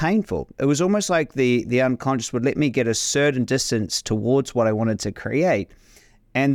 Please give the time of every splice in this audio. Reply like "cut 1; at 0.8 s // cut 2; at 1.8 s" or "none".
none